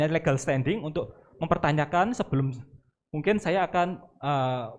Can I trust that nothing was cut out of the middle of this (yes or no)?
yes